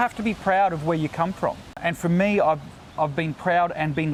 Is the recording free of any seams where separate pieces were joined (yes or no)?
yes